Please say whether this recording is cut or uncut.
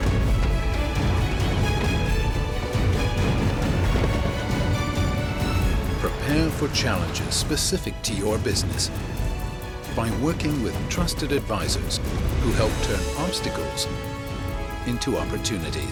uncut